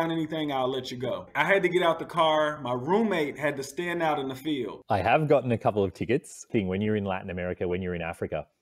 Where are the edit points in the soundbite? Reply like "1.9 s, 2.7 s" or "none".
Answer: 1.2 s, 4.9 s, 6.4 s